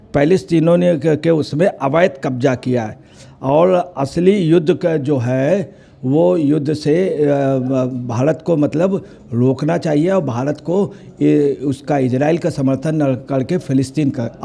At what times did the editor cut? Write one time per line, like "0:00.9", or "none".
none